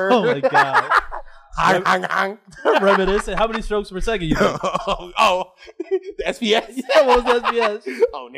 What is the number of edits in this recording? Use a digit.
0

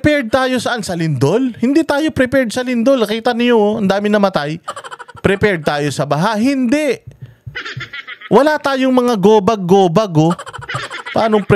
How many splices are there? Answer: 0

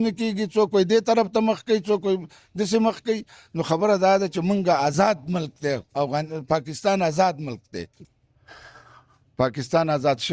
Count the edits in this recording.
1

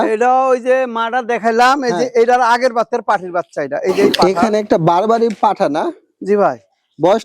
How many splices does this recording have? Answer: 1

